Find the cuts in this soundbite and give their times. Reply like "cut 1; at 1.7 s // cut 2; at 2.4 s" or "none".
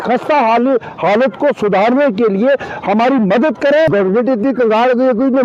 cut 1; at 3.9 s

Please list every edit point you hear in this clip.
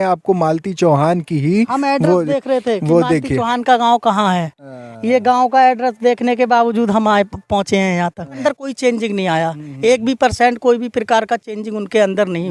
cut 1; at 8.4 s

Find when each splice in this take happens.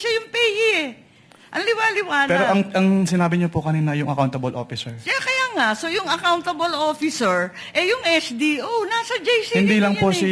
none

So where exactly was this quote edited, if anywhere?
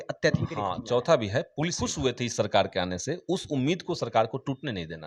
cut 1; at 1.8 s

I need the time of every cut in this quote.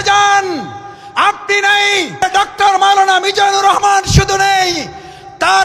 cut 1; at 2.2 s

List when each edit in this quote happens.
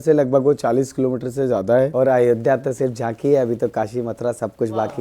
cut 1; at 1.9 s

